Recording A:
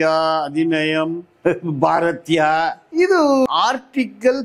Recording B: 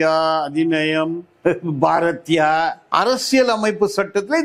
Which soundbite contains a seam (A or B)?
B